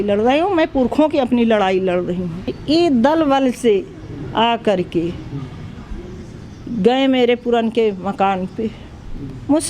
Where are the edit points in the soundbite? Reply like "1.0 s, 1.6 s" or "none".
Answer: 2.6 s